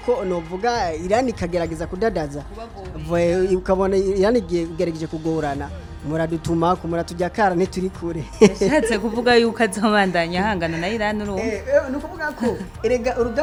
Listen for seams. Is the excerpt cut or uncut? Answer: uncut